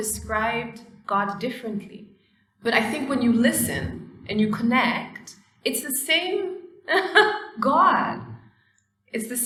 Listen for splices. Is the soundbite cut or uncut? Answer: uncut